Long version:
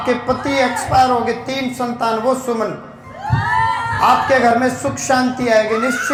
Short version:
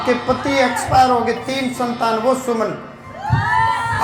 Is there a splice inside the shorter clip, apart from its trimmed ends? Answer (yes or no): no